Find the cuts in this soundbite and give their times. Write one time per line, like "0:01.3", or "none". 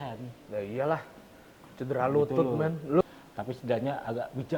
0:03.0